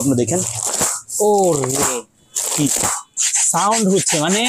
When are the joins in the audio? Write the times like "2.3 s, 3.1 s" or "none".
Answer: 3.2 s